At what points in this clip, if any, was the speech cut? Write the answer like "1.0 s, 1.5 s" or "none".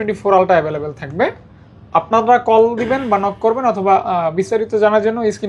none